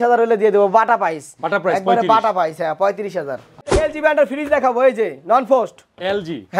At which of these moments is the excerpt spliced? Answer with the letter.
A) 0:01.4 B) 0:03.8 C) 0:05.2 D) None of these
B